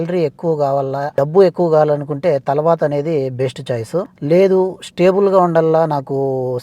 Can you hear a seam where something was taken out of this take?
yes; 2 cuts; at 1.1 s, 4.1 s

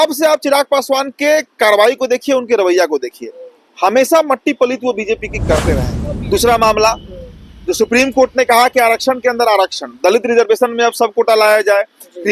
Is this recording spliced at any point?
yes; 1 cut; at 5.9 s

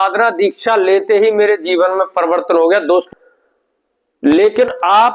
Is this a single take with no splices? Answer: no; 1 cut; at 3.1 s

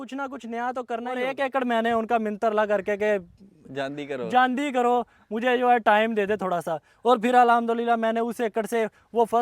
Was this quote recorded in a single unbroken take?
no; 1 cut; at 1.2 s

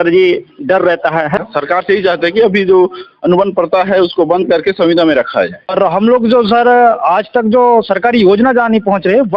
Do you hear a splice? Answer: yes; 2 cuts; at 1.4 s, 5.8 s

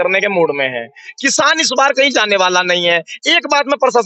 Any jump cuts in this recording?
no; 0 cuts

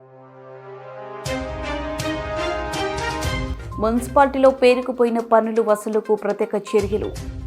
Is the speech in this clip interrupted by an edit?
yes; 1 cut; at 3.5 s

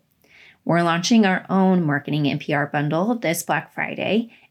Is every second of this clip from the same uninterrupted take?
yes; 0 cuts

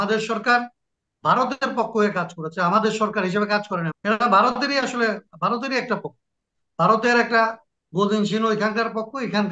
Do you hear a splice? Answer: yes; 1 cut; at 3.9 s

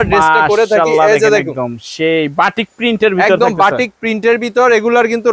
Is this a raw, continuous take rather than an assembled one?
yes; 0 cuts

